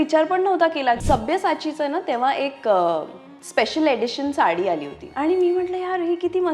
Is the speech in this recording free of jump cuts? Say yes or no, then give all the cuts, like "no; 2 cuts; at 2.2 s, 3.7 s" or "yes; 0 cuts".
no; 2 cuts; at 1.0 s, 5.0 s